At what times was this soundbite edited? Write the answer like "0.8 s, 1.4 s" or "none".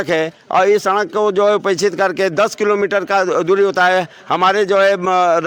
none